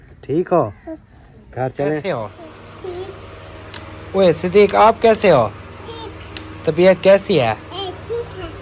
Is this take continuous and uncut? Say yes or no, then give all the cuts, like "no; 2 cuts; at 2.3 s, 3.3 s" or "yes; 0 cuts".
no; 1 cut; at 2.2 s